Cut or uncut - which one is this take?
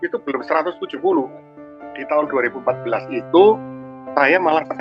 cut